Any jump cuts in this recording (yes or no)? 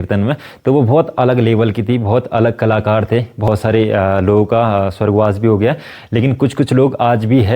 yes